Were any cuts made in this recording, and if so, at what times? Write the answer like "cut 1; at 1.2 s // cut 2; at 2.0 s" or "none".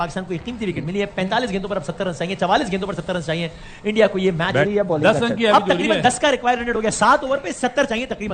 cut 1; at 4.7 s